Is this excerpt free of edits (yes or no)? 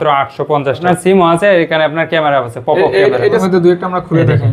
no